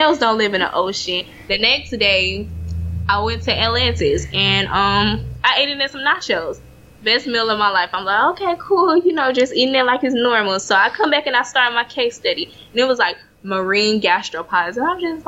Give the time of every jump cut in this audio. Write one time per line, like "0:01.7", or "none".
0:01.3